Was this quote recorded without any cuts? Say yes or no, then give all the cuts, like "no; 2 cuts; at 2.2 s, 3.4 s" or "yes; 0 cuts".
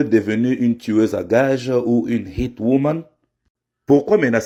yes; 0 cuts